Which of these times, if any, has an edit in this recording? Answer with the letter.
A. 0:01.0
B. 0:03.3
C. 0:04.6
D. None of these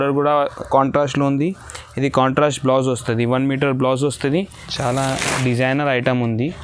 C